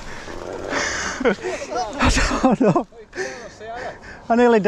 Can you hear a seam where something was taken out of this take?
no; 0 cuts

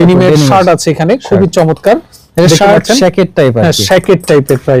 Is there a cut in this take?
no; 0 cuts

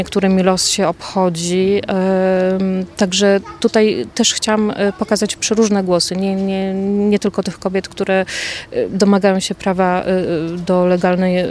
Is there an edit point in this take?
no; 0 cuts

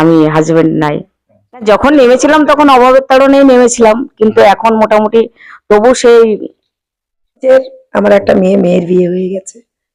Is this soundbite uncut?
no; 2 cuts; at 1.6 s, 7.4 s

